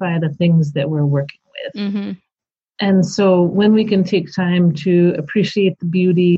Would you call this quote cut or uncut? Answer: uncut